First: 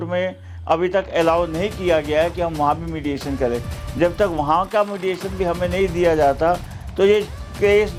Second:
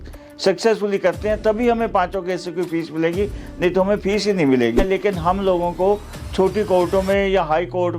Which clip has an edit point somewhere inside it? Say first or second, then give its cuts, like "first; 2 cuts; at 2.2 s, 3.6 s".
second; 1 cut; at 4.8 s